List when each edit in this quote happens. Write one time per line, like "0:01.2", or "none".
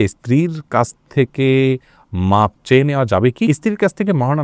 none